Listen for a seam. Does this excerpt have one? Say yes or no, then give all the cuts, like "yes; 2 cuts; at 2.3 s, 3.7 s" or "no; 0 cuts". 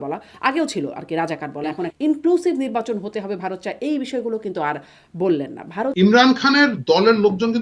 yes; 2 cuts; at 1.9 s, 5.9 s